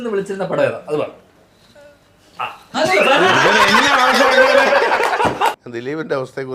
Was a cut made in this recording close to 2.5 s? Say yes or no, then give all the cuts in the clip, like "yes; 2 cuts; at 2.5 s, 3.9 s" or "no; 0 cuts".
no; 1 cut; at 5.6 s